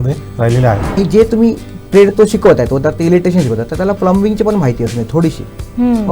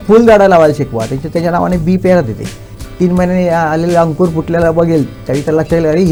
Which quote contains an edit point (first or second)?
first